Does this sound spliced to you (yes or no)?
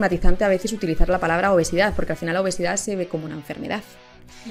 no